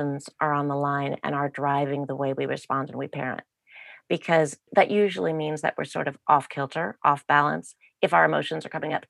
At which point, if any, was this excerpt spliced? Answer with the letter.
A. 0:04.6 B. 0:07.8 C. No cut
A